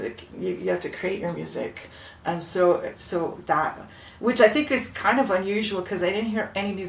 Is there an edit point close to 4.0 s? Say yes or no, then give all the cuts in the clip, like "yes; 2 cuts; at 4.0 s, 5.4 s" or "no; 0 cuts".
no; 0 cuts